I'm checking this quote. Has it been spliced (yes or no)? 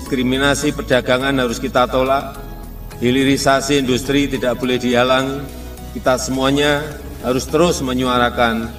no